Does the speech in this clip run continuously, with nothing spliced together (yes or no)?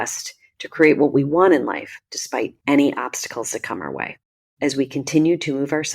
no